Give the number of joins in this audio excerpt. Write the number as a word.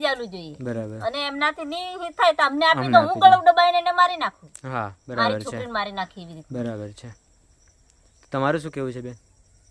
zero